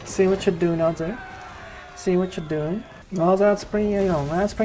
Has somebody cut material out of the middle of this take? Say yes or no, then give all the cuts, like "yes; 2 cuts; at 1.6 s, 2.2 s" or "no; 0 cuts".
yes; 1 cut; at 3.0 s